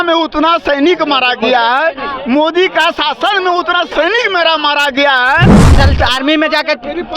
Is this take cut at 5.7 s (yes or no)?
yes